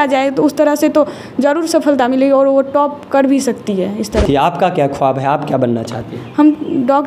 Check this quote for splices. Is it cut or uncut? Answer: cut